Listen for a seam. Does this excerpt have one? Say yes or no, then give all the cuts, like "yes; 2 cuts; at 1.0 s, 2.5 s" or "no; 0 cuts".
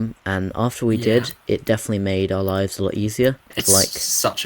yes; 1 cut; at 3.5 s